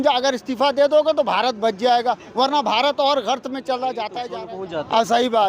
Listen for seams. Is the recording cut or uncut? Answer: cut